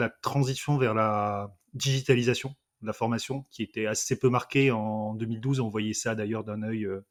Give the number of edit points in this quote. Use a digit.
0